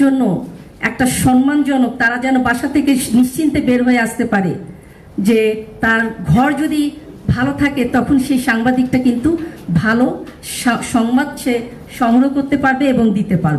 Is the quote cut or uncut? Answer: uncut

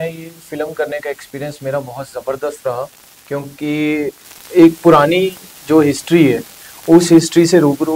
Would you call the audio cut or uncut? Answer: uncut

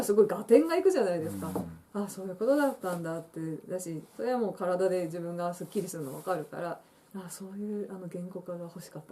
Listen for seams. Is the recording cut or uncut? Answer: uncut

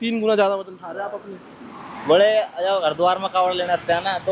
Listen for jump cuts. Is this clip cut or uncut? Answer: uncut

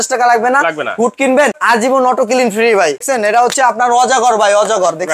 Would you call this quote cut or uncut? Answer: cut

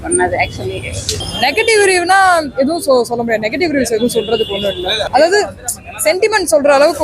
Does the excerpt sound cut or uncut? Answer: cut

